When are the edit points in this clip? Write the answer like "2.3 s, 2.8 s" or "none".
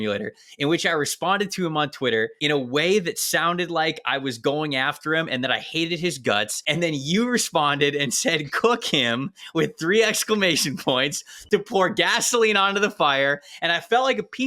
2.4 s, 6.6 s